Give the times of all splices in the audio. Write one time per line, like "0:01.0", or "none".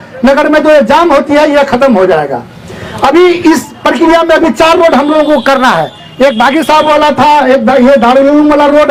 none